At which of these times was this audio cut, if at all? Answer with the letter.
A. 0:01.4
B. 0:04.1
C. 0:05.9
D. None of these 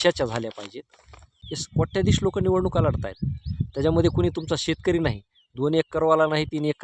A